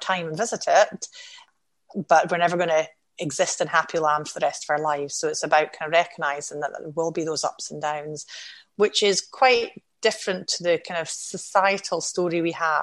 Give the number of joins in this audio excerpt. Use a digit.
1